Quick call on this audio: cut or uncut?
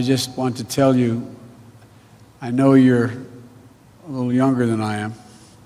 uncut